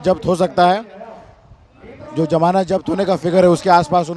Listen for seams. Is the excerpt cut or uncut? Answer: uncut